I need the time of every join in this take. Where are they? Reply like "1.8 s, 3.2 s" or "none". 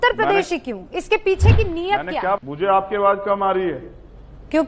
2.4 s